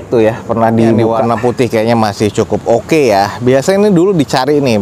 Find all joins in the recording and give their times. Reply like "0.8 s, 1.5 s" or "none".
1.1 s